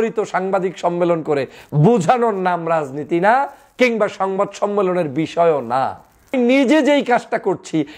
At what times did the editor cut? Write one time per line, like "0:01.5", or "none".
0:06.3

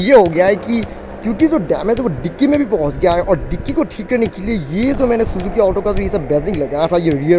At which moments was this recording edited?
none

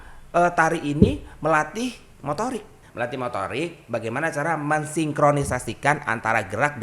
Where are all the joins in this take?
0:02.8

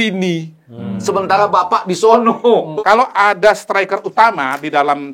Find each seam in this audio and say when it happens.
0:02.7

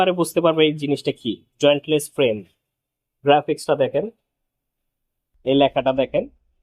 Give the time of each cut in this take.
none

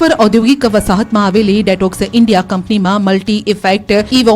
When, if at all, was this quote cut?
0:02.0

